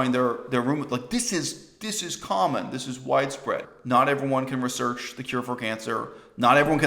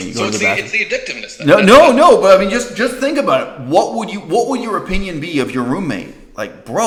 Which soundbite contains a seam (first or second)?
first